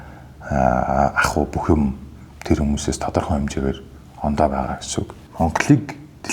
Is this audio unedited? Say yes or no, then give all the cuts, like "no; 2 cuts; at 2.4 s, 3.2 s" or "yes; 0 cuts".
no; 1 cut; at 5.2 s